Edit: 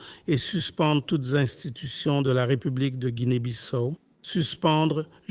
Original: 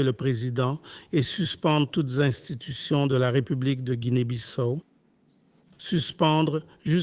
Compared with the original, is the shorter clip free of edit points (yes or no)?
no